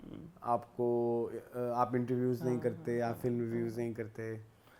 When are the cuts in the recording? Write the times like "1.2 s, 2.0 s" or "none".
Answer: none